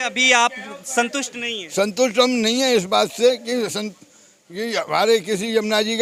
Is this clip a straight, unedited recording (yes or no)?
yes